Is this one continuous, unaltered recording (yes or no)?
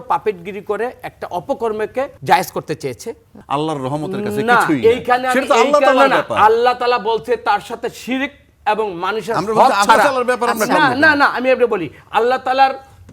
no